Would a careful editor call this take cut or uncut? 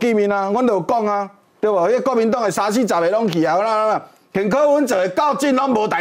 uncut